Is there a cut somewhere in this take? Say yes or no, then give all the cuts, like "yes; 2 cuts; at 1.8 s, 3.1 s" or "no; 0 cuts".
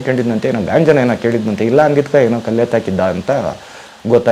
no; 0 cuts